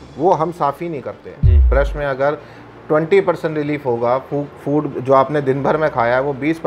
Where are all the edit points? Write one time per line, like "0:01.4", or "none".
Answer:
0:01.7